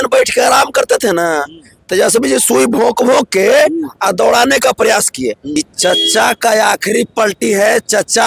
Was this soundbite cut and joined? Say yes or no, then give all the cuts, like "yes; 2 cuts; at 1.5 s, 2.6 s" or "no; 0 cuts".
yes; 1 cut; at 5.6 s